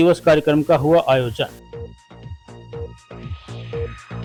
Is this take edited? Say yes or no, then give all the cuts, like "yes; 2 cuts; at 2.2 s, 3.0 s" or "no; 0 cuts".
no; 0 cuts